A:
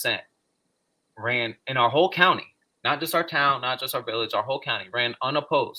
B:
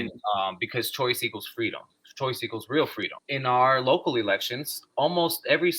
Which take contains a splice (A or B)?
B